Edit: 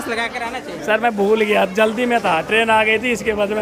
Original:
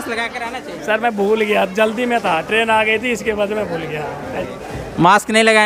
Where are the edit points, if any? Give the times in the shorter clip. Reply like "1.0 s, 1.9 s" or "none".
none